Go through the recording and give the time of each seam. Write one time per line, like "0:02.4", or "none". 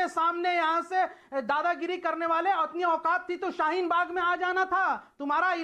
none